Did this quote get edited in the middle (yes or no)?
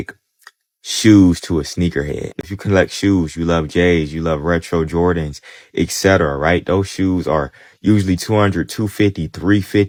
no